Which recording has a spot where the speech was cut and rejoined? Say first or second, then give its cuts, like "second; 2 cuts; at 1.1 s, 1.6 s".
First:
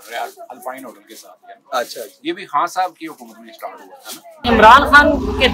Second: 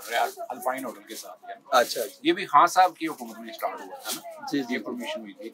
first; 1 cut; at 4.4 s